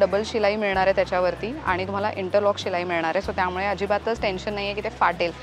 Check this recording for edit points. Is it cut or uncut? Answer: uncut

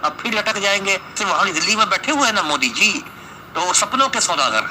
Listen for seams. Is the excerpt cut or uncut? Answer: cut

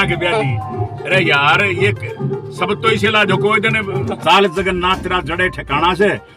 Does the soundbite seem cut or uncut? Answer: cut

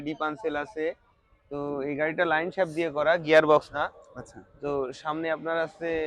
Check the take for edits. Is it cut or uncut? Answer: uncut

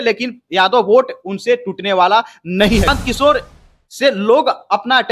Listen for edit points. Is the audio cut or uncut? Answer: cut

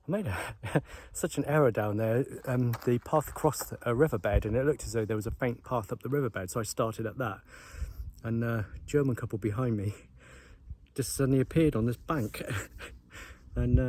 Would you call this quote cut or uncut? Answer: uncut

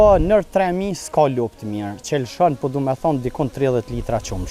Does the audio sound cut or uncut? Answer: uncut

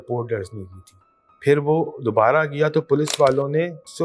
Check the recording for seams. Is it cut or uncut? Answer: uncut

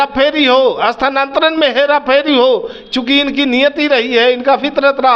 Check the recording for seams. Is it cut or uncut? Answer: uncut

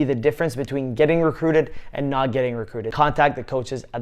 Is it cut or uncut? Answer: cut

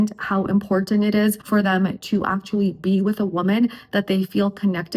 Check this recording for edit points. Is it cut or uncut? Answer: cut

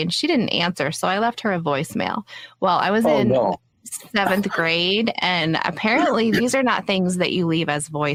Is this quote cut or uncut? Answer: uncut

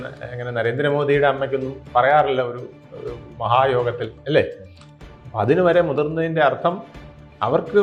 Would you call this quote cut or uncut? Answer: uncut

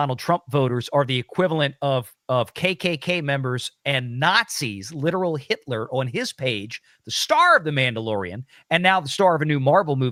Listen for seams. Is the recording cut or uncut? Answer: uncut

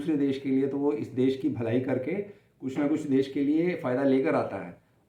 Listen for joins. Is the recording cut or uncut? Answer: uncut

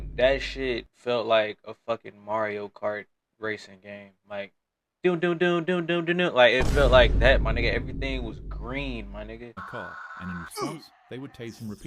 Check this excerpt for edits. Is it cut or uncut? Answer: cut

